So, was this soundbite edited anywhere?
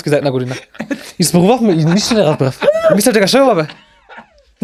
no; 0 cuts

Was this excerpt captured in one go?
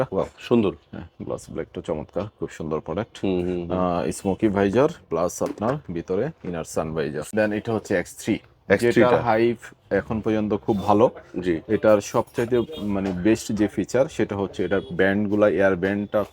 no; 1 cut; at 7.2 s

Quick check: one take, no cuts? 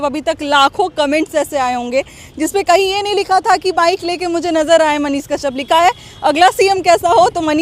yes; 0 cuts

